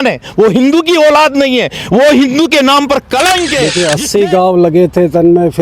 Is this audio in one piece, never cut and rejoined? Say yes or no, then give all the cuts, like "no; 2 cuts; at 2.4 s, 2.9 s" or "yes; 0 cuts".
no; 1 cut; at 3.7 s